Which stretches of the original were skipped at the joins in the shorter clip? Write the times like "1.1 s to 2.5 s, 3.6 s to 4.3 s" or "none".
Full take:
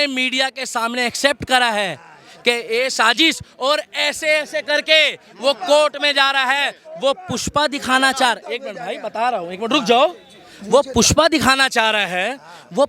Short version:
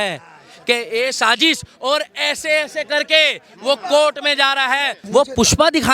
6.7 s to 10.5 s